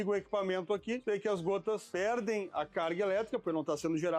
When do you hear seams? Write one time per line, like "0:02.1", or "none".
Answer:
0:01.0
0:01.9